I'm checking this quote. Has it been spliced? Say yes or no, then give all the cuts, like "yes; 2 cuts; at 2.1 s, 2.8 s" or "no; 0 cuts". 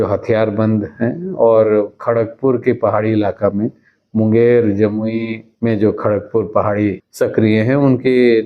yes; 2 cuts; at 5.4 s, 7.0 s